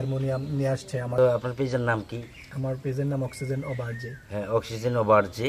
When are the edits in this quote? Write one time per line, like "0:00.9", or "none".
0:01.2

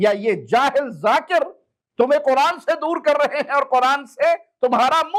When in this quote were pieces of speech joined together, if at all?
none

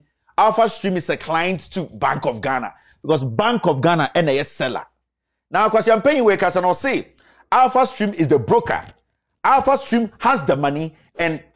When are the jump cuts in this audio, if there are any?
none

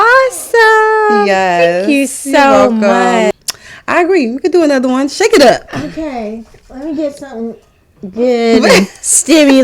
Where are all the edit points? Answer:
0:03.3

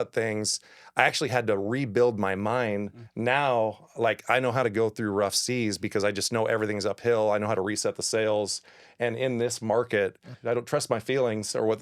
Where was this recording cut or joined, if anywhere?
0:03.0
0:10.3

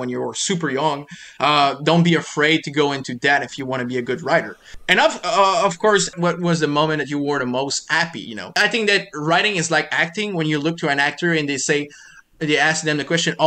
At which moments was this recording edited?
0:04.8
0:06.1
0:08.5

